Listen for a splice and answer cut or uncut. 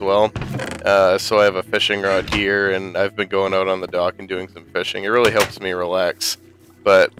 uncut